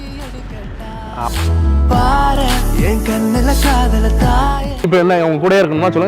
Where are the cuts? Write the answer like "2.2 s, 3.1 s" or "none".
4.8 s